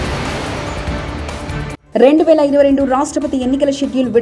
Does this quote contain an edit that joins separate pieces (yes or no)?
yes